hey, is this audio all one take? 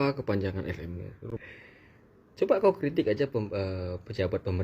no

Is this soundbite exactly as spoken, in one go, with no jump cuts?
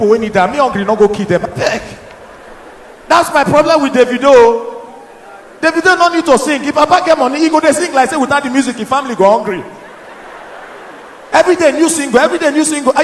yes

